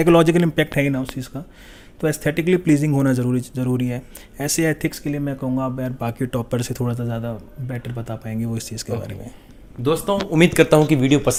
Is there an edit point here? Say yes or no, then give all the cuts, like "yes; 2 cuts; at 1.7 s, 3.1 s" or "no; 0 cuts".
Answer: no; 0 cuts